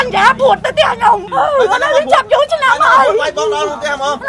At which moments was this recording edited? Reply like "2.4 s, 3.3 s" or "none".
1.3 s